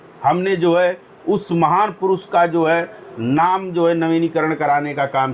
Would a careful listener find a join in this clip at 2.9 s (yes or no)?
no